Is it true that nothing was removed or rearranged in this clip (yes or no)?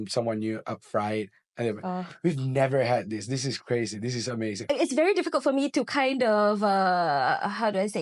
no